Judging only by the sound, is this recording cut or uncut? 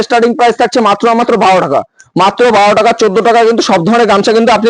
uncut